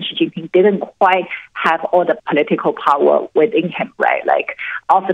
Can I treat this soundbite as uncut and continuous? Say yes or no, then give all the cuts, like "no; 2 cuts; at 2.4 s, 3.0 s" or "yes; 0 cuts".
yes; 0 cuts